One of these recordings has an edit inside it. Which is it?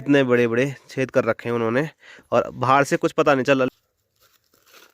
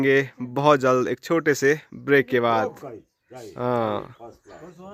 first; 1 cut; at 3.7 s

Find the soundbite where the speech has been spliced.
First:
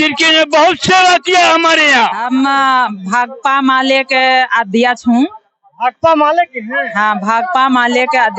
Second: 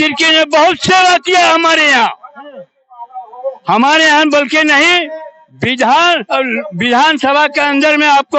first; 1 cut; at 2.2 s

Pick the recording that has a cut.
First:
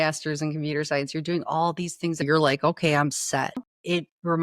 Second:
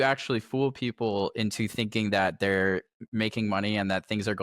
first; 2 cuts; at 2.2 s, 3.6 s

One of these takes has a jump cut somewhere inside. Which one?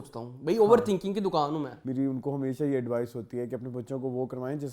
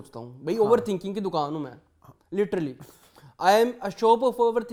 first; 1 cut; at 1.8 s

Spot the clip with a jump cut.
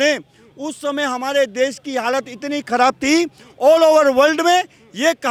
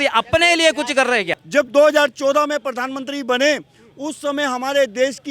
second; 1 cut; at 1.4 s

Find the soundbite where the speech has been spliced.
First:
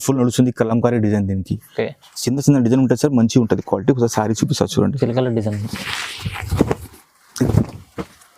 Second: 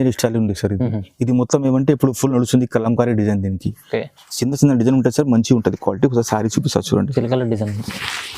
first; 1 cut; at 7.4 s

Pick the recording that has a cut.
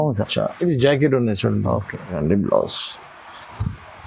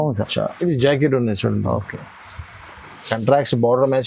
first; 1 cut; at 2.2 s

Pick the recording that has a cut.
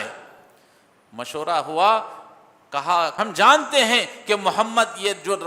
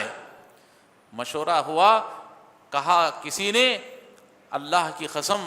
first; 1 cut; at 3.2 s

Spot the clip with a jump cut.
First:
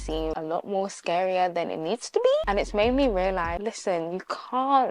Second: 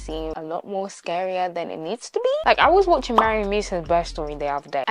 first; 1 cut; at 2.4 s

